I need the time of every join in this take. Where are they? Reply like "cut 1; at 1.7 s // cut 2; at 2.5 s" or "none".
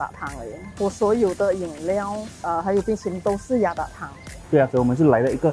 cut 1; at 4.3 s